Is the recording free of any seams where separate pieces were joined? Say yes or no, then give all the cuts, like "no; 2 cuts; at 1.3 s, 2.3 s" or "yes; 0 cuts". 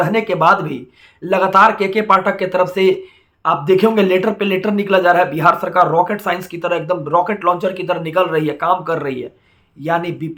yes; 0 cuts